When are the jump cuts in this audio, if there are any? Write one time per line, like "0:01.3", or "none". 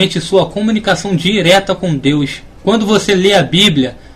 0:01.6